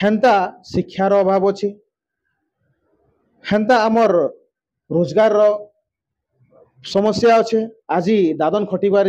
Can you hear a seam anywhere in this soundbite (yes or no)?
no